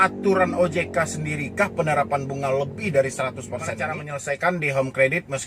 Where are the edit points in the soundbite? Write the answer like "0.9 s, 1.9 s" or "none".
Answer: 4.1 s